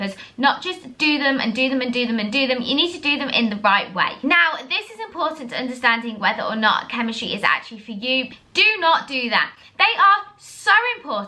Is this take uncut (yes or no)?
no